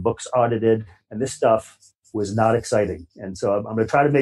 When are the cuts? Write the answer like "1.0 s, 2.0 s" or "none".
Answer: 1.0 s